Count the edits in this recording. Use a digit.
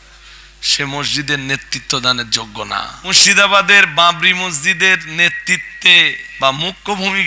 2